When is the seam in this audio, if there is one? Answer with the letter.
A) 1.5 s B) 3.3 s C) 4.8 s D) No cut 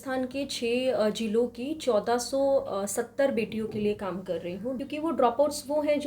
C